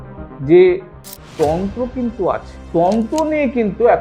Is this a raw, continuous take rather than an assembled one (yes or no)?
no